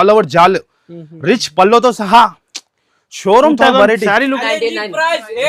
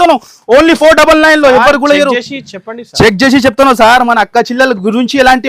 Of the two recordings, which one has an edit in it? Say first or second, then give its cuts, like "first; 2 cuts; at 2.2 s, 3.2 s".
first; 1 cut; at 4.4 s